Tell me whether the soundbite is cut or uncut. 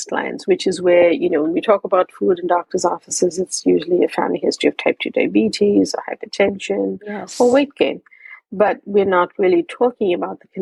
uncut